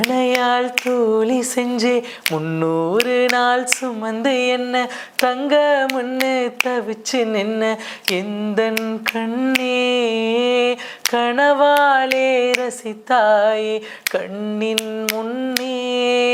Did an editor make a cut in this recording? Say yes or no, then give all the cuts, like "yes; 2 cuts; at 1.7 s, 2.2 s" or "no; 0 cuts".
no; 0 cuts